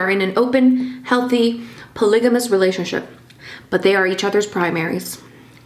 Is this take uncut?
yes; 0 cuts

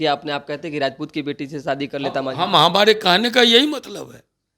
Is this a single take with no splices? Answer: yes; 0 cuts

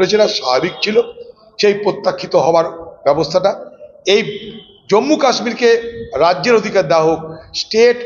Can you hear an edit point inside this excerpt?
no; 0 cuts

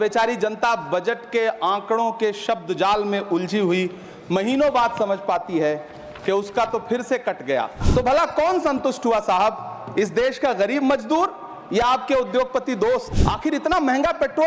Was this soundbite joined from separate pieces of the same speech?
yes; 2 cuts; at 7.8 s, 13.1 s

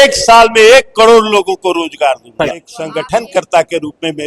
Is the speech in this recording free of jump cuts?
no; 1 cut; at 2.8 s

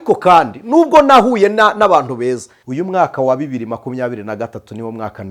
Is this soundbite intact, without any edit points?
no; 1 cut; at 2.6 s

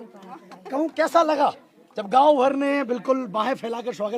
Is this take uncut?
no; 1 cut; at 0.9 s

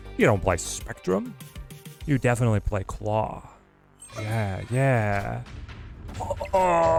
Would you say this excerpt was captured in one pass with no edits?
yes; 0 cuts

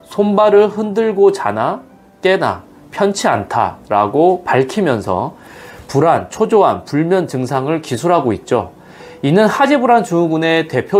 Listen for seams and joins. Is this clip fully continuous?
yes; 0 cuts

